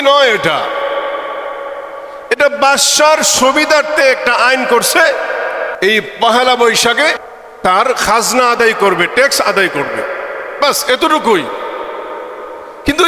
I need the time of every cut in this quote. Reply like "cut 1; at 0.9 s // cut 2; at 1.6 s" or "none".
cut 1; at 5.7 s // cut 2; at 7.2 s